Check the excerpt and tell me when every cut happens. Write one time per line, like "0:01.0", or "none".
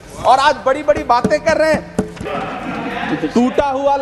0:02.0